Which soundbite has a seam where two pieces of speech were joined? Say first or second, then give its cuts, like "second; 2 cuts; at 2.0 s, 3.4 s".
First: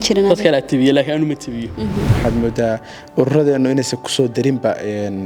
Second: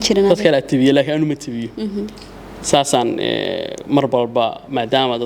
first; 1 cut; at 2.1 s